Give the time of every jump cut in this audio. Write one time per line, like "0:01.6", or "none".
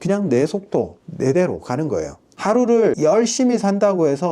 0:01.0
0:02.2
0:03.0